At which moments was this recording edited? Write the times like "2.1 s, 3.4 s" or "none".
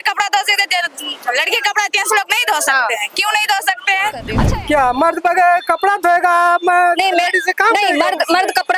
4.4 s

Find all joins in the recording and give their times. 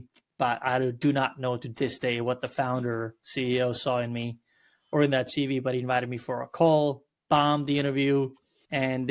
none

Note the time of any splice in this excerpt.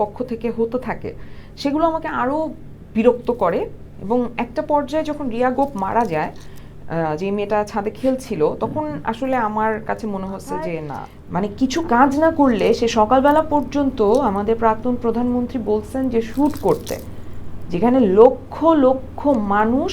10.9 s

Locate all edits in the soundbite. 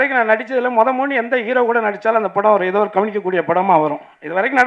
none

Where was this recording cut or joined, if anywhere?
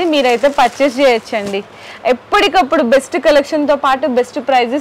none

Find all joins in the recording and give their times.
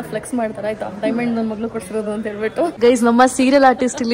2.7 s

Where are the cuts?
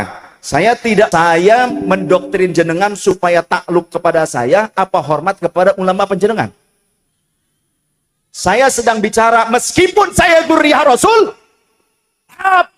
1.1 s

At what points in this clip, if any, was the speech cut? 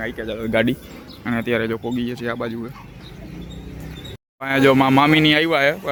none

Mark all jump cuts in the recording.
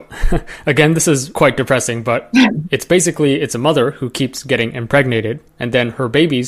1.3 s

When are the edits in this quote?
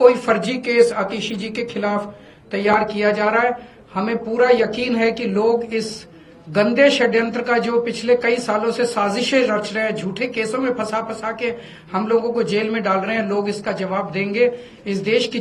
none

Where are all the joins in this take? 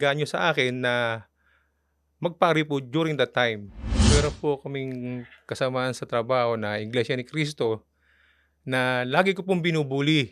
4.1 s

